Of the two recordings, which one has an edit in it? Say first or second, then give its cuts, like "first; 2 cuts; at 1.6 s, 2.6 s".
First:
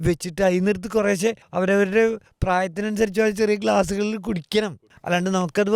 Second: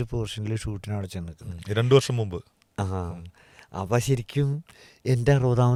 first; 3 cuts; at 1.4 s, 2.3 s, 4.8 s